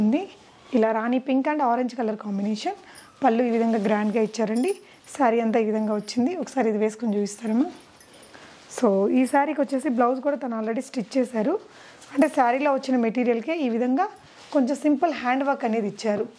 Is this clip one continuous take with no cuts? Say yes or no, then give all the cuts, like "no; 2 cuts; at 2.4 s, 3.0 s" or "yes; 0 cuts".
yes; 0 cuts